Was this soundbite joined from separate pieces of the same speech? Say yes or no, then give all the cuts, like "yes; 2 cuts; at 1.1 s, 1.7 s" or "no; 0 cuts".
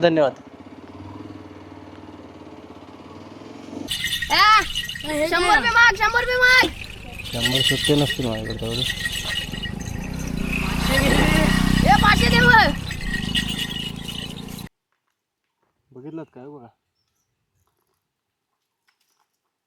yes; 2 cuts; at 4.1 s, 14.7 s